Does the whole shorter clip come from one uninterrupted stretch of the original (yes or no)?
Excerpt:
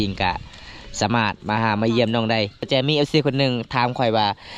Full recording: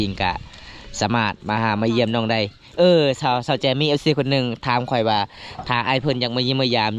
no